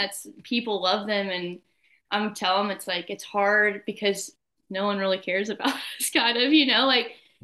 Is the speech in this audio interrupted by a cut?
no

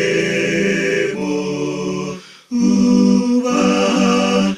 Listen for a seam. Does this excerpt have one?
no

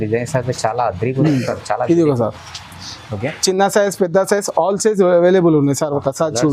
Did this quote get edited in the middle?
no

